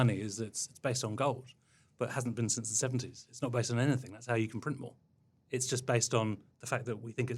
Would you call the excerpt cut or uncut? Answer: cut